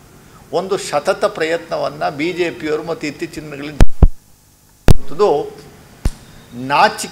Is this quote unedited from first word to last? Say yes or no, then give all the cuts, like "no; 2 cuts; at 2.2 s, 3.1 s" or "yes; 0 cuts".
yes; 0 cuts